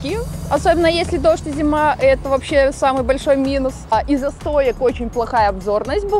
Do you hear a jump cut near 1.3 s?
no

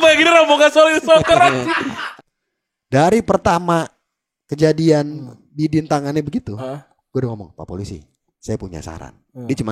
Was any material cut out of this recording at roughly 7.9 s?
no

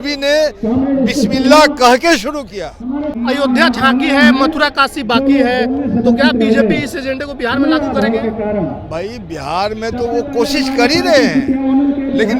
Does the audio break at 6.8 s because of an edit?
no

